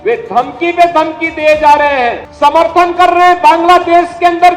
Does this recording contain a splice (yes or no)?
yes